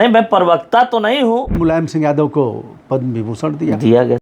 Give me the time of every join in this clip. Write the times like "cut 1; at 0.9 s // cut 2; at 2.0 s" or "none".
cut 1; at 1.6 s

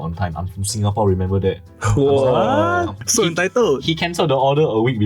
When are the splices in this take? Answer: cut 1; at 3.0 s

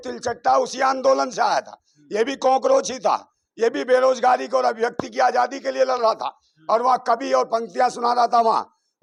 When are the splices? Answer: none

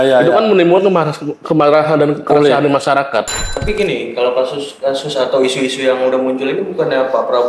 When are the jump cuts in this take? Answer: cut 1; at 3.4 s

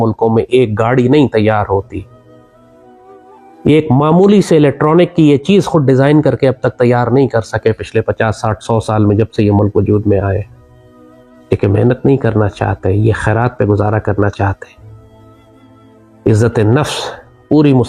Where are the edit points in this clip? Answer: none

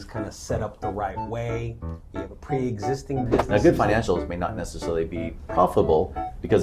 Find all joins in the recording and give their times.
cut 1; at 3.4 s

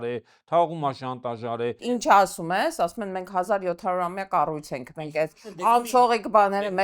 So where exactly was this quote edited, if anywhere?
cut 1; at 1.8 s

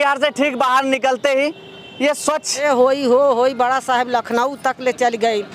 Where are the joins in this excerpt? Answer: cut 1; at 2.6 s

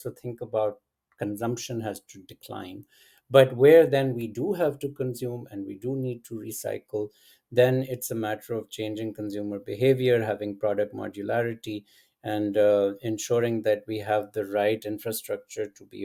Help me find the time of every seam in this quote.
none

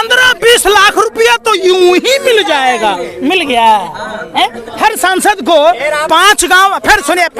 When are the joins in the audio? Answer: none

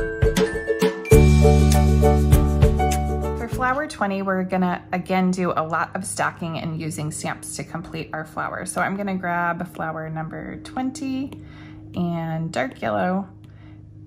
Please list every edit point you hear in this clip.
cut 1; at 3.4 s

